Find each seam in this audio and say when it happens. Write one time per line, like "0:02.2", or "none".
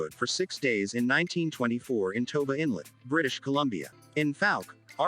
0:03.9